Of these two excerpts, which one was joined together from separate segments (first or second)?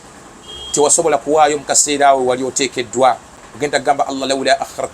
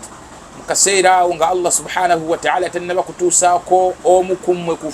first